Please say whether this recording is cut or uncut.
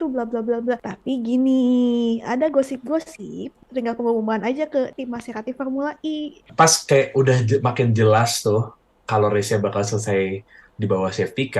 cut